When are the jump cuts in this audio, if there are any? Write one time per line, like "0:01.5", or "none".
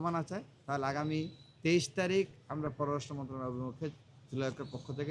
none